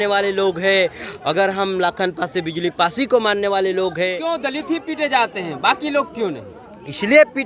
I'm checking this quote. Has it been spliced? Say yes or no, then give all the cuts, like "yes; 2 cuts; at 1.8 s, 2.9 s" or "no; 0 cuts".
yes; 1 cut; at 4.2 s